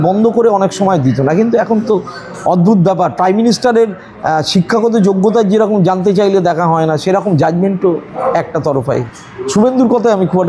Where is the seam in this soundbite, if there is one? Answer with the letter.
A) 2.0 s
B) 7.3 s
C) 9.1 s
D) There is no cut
C